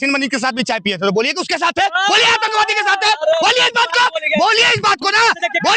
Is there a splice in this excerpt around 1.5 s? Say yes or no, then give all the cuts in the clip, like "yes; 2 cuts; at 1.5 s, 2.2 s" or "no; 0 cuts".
no; 0 cuts